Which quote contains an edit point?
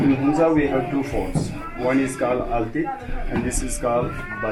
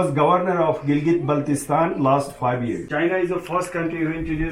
second; 1 cut; at 2.9 s

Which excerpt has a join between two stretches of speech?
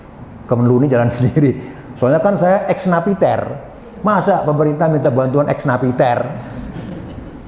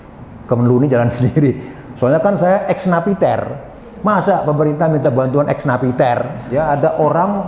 second; 1 cut; at 6.4 s

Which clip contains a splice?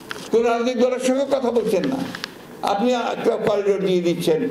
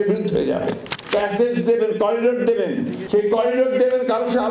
second; 2 cuts; at 0.9 s, 3.0 s

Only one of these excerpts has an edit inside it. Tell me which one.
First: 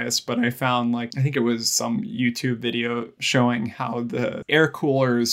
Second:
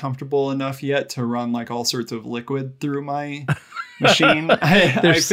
first; 3 cuts; at 1.1 s, 3.2 s, 4.5 s

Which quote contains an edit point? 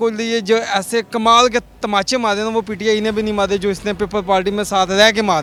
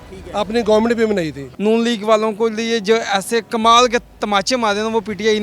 second; 1 cut; at 1.4 s

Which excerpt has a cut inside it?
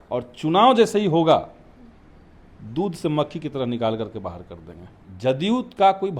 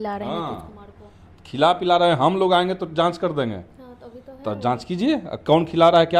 first; 1 cut; at 5.0 s

